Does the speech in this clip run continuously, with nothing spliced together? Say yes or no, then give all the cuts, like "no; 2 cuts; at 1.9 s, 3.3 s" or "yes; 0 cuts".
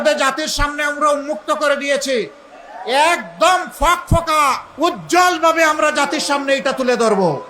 no; 1 cut; at 4.7 s